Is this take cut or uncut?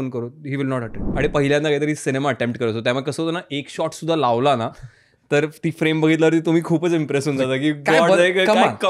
cut